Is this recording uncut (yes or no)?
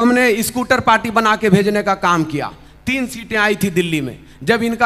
yes